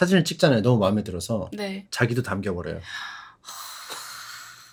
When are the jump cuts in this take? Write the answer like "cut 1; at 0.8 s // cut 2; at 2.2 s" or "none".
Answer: none